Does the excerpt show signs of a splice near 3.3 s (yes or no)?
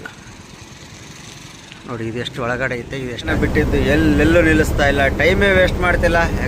yes